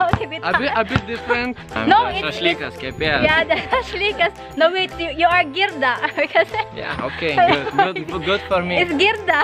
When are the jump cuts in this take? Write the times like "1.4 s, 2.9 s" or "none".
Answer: 1.7 s